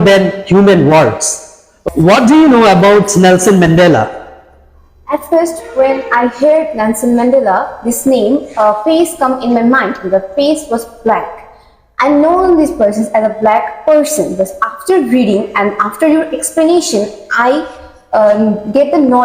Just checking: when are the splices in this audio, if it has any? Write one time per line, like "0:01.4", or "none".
0:01.7